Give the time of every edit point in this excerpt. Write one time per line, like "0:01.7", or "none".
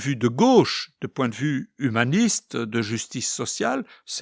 none